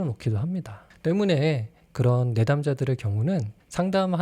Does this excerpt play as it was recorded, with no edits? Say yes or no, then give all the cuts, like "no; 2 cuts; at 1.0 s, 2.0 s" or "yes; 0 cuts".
no; 1 cut; at 1.8 s